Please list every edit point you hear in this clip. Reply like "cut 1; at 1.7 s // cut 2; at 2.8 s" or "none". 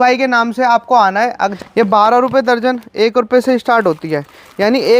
cut 1; at 1.5 s

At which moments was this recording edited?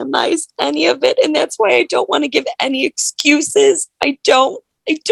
none

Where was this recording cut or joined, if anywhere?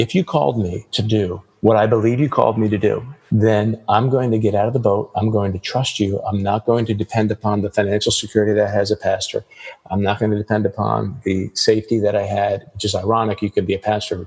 cut 1; at 1.0 s // cut 2; at 3.1 s

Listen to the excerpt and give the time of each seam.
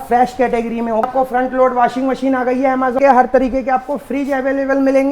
cut 1; at 1.0 s // cut 2; at 3.0 s

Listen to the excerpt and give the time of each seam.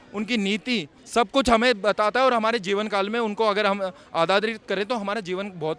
cut 1; at 0.9 s

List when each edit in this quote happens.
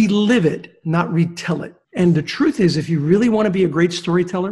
cut 1; at 1.8 s

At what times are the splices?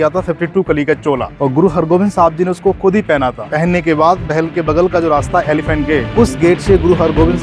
none

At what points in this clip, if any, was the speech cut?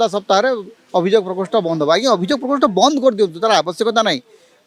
none

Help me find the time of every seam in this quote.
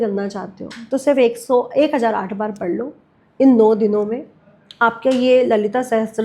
none

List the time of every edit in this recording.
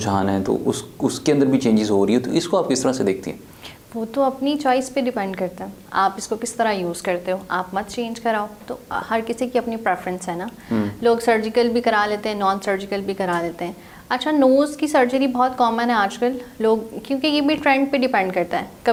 none

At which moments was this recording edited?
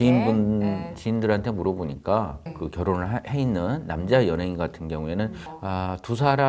cut 1; at 5.5 s

